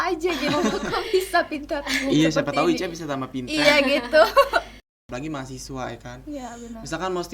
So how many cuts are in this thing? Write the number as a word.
one